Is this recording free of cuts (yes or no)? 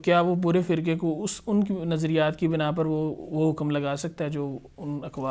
yes